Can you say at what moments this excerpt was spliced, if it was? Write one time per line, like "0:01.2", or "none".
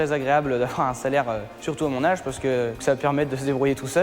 0:02.8